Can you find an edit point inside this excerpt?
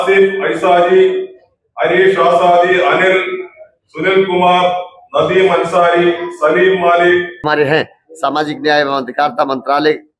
yes; 1 cut; at 7.4 s

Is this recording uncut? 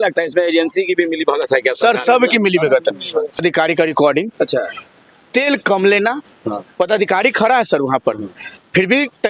no; 1 cut; at 3.4 s

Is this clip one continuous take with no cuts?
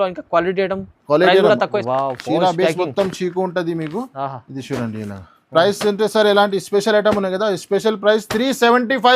no; 1 cut; at 1.7 s

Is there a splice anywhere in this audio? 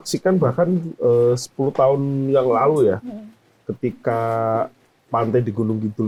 no; 0 cuts

